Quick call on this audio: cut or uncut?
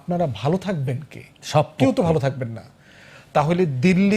uncut